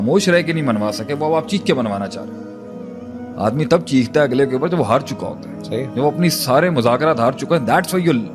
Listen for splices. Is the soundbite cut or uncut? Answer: uncut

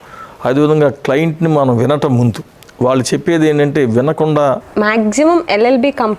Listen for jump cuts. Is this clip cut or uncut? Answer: cut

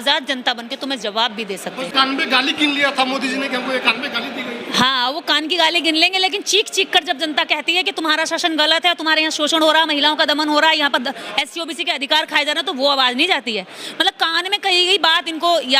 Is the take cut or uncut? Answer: cut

